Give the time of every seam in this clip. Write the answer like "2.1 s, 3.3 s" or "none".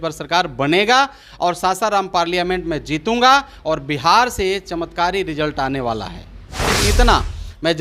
6.6 s